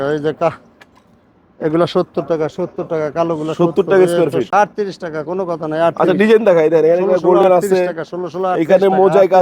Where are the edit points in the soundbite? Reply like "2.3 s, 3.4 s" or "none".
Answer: 4.5 s